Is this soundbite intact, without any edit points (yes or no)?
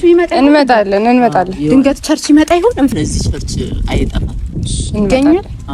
no